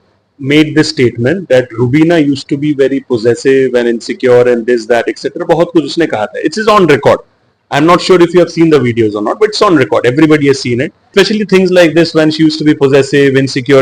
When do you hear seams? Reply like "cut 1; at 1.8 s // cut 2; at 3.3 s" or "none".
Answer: cut 1; at 11.1 s